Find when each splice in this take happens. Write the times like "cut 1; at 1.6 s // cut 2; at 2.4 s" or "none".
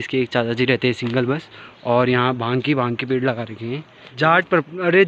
cut 1; at 4.0 s